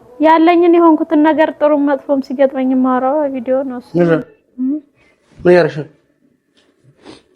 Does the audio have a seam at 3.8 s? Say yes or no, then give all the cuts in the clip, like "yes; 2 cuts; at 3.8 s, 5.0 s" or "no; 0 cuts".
yes; 1 cut; at 3.8 s